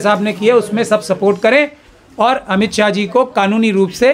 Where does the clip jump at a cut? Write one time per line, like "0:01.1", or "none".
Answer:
none